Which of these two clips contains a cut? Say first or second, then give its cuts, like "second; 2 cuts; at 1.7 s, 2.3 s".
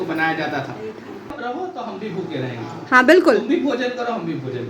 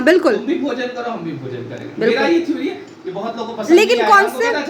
first; 1 cut; at 1.3 s